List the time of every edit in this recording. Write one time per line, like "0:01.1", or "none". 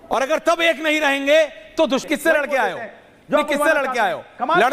0:02.0